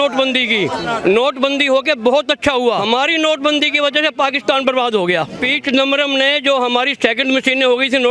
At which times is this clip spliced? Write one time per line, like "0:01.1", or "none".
0:02.8
0:05.5